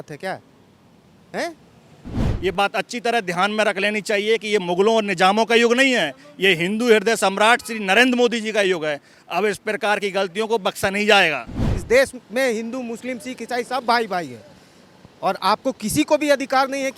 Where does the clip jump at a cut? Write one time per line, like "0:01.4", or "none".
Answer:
0:02.3
0:11.7